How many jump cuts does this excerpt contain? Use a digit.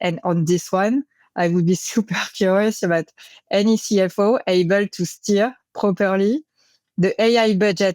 0